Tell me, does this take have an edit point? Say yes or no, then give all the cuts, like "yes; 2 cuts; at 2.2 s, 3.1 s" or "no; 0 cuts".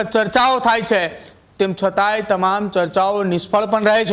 no; 0 cuts